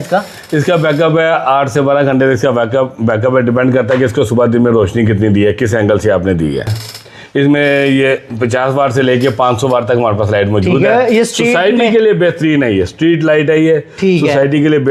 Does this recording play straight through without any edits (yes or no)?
no